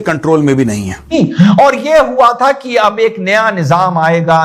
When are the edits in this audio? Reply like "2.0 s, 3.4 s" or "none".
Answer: 1.1 s